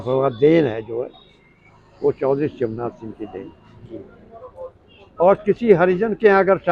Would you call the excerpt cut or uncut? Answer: cut